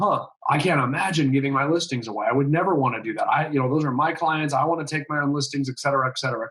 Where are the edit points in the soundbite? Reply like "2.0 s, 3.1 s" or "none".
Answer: none